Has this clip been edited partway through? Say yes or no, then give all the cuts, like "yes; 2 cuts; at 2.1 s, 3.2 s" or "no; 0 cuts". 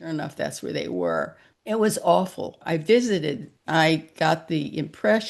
yes; 3 cuts; at 1.5 s, 2.6 s, 3.5 s